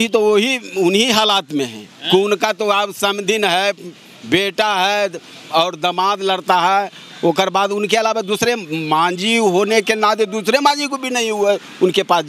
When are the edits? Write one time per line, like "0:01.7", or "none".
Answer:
none